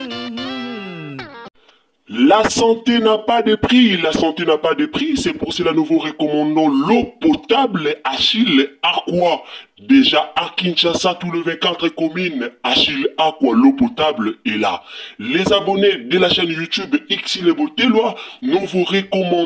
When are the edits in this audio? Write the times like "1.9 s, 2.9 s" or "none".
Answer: 1.4 s

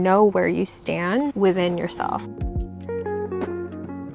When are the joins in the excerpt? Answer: 2.3 s

